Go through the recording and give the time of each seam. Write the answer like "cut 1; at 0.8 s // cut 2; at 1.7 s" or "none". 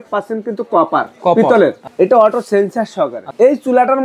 cut 1; at 1.8 s // cut 2; at 3.2 s